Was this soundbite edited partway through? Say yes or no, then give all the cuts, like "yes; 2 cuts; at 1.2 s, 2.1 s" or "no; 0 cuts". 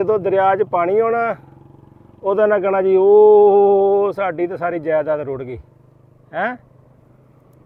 no; 0 cuts